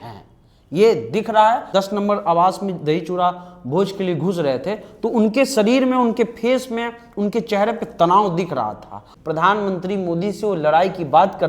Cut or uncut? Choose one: cut